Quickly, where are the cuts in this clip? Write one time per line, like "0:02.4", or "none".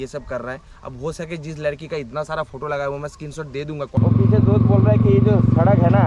0:04.0